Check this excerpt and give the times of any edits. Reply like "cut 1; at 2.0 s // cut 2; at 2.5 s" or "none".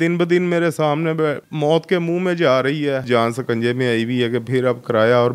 cut 1; at 1.5 s // cut 2; at 3.0 s